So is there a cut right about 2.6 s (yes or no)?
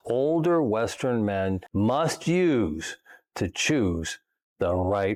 no